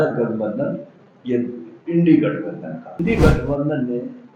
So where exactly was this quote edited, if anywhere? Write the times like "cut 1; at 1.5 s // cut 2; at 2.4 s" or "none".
cut 1; at 3.0 s